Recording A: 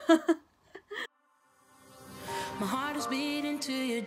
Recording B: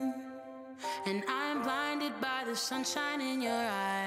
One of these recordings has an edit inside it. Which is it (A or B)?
A